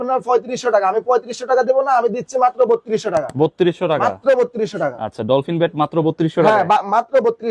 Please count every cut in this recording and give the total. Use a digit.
0